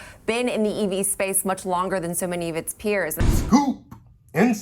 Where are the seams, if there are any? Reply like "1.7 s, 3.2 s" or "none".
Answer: 3.2 s

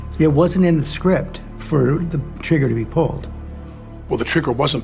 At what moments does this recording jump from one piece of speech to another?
none

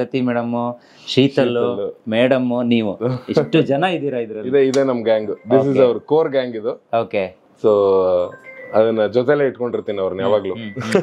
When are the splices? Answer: none

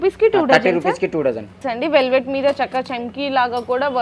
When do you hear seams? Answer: 1.6 s

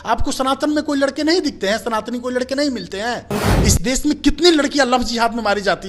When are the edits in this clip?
3.4 s

